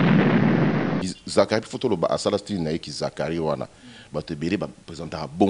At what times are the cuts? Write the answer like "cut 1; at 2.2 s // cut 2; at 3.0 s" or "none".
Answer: cut 1; at 1.2 s